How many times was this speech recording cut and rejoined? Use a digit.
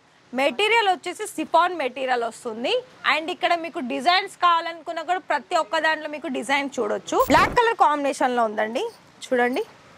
1